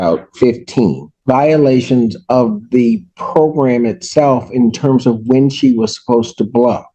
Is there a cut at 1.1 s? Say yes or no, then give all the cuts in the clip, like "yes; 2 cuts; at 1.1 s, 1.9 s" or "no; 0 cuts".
yes; 1 cut; at 1.1 s